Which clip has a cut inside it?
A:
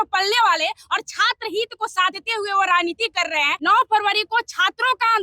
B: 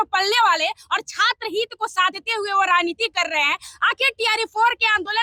A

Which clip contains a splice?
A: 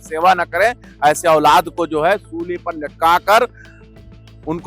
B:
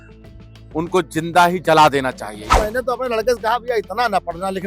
B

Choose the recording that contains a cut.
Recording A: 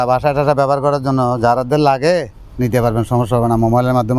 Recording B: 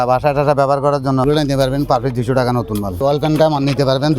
B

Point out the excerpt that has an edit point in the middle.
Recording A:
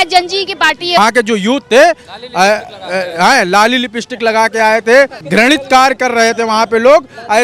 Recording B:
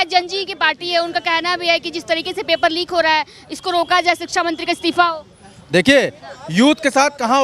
A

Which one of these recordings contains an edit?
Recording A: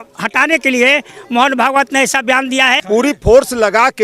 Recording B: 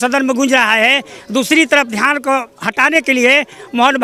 A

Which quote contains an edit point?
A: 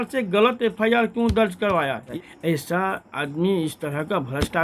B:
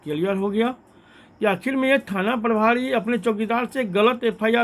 A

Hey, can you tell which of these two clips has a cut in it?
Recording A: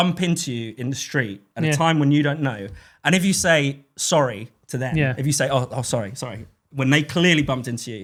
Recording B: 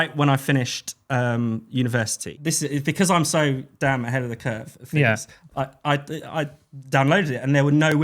B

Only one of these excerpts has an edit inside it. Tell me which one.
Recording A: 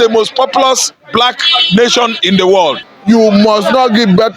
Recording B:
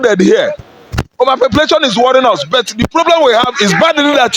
A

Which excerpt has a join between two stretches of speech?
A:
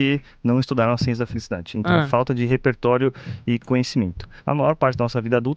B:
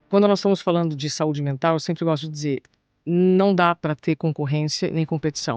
A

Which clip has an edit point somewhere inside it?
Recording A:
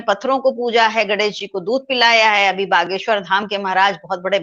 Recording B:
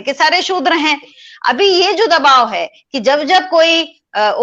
B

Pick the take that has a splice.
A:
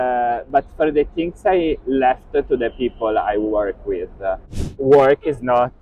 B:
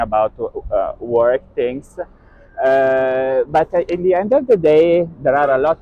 A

